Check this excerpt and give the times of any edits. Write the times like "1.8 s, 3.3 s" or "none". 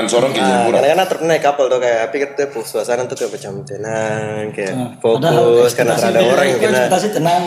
none